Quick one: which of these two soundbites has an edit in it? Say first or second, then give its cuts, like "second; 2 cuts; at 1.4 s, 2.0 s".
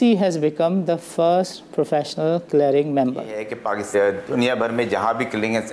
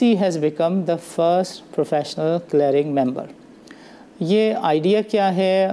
first; 1 cut; at 3.6 s